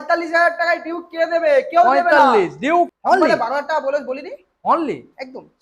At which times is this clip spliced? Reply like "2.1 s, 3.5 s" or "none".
2.9 s